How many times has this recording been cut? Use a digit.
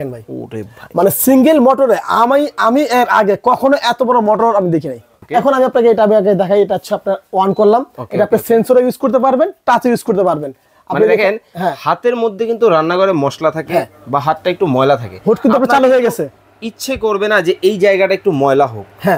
1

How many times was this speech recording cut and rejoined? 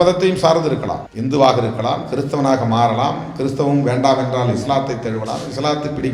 1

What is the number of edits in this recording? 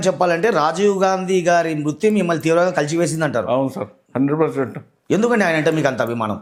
0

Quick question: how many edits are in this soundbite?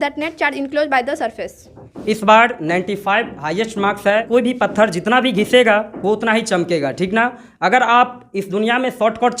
2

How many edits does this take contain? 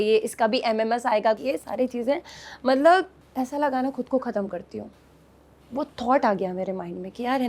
0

